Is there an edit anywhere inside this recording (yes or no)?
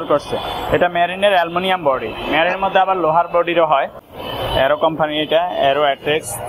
yes